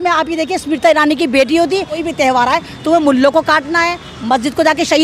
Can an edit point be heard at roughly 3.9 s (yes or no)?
no